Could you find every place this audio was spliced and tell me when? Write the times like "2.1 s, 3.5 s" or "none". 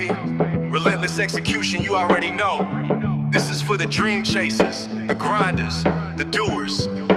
none

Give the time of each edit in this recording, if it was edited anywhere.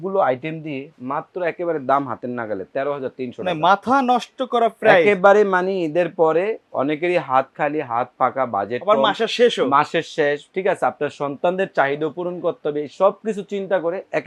none

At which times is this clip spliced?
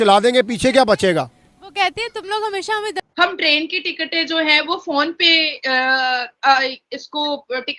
3.0 s

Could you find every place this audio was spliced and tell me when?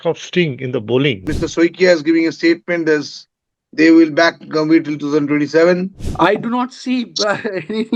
1.3 s, 6.0 s

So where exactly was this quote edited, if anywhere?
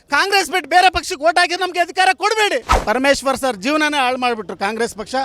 2.7 s

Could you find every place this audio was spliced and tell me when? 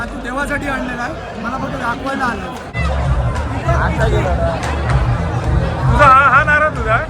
2.8 s

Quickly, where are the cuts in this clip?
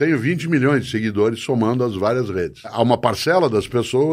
2.7 s

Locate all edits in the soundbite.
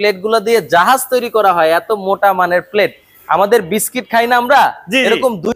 none

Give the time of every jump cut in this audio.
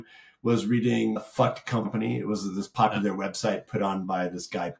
1.6 s

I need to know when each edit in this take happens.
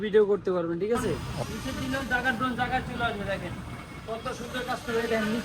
1.3 s

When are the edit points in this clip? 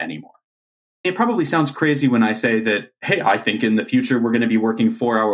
1.0 s

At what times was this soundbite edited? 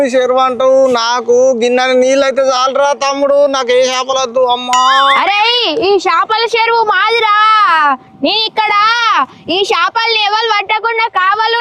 5.1 s

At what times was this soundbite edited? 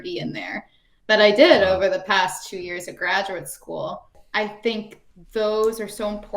4.2 s

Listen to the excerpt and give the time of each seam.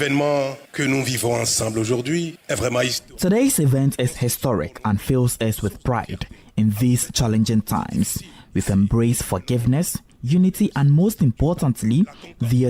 none

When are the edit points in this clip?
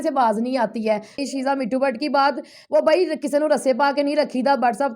1.2 s

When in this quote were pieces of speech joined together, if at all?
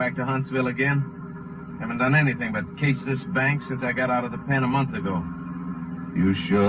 none

